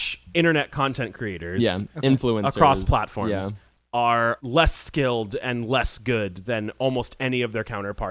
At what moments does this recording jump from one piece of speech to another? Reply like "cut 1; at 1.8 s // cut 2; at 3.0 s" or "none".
cut 1; at 4.4 s

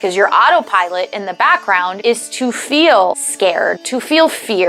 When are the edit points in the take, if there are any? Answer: cut 1; at 2.0 s // cut 2; at 3.3 s

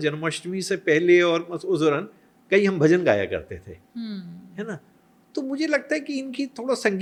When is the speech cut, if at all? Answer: none

